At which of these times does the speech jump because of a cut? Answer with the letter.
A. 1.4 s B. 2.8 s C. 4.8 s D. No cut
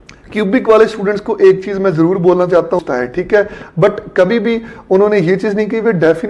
B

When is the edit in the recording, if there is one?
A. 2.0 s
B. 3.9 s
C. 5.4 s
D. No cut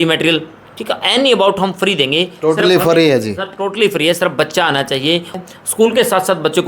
C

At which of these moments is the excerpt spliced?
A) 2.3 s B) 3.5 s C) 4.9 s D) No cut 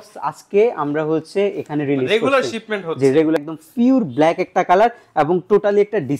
B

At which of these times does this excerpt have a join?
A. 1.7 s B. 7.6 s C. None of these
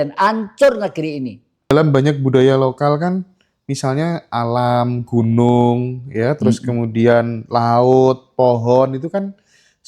A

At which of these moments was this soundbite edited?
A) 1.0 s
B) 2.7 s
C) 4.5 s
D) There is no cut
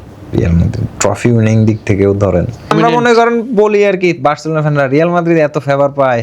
B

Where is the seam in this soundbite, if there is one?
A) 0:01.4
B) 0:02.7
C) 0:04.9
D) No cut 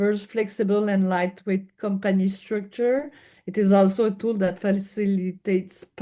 D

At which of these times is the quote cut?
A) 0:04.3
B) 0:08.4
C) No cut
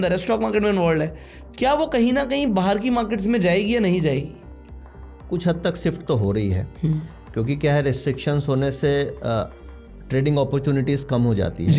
C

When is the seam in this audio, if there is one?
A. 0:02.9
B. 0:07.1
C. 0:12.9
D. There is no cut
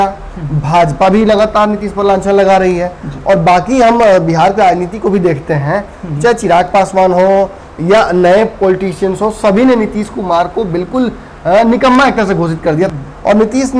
C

